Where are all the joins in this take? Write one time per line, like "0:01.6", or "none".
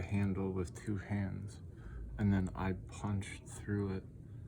none